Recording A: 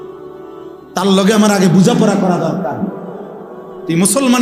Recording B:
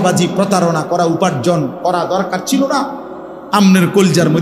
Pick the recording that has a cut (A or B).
A